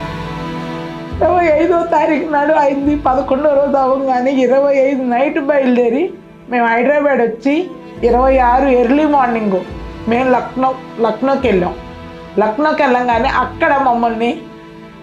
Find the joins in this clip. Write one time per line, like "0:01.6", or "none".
none